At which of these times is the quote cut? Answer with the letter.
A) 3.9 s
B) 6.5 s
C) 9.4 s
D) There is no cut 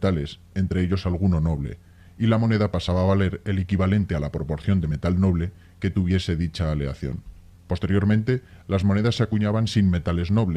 D